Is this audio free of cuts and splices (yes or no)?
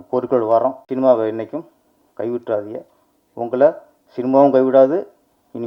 yes